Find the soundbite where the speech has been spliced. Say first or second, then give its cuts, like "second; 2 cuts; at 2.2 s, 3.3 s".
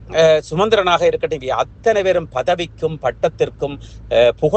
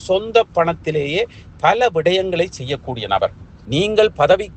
second; 1 cut; at 3.5 s